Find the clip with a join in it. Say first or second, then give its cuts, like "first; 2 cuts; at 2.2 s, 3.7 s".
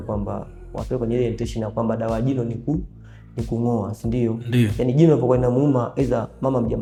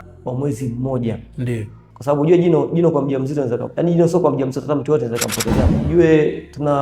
second; 2 cuts; at 1.8 s, 5.8 s